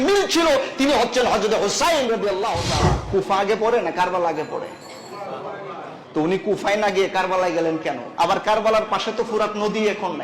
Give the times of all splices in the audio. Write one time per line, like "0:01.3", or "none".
0:03.0
0:08.0